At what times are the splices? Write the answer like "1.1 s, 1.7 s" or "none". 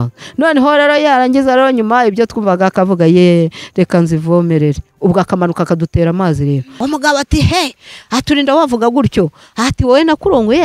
6.7 s